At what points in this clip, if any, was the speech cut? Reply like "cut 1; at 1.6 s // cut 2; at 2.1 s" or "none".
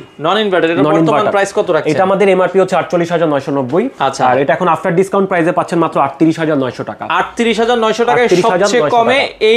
none